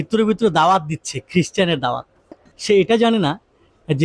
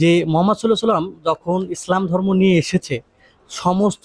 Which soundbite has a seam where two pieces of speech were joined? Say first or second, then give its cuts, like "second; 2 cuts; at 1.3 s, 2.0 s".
first; 1 cut; at 2.5 s